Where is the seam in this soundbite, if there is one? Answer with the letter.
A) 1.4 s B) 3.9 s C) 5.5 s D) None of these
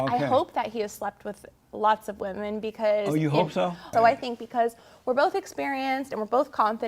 B